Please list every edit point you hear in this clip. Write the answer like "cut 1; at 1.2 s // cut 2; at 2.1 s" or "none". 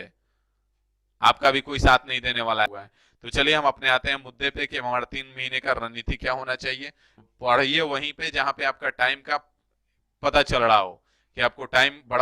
cut 1; at 2.9 s // cut 2; at 7.2 s